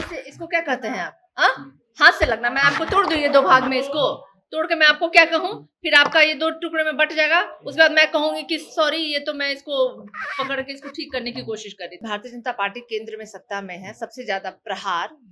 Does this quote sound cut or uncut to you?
cut